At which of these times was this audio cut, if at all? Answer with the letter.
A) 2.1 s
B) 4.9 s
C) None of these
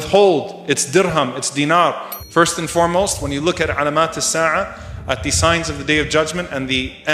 A